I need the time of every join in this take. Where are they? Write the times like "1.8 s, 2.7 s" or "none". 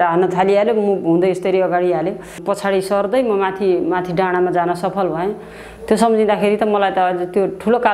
2.4 s